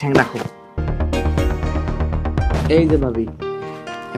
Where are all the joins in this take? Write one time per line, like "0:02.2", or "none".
0:00.8
0:02.5